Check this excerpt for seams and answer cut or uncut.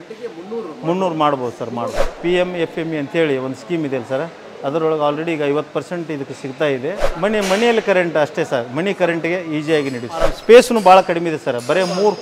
cut